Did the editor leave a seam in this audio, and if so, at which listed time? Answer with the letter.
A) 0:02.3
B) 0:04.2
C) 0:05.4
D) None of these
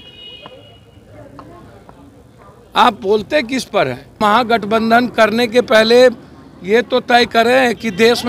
B